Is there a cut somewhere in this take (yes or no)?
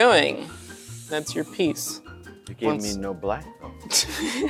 no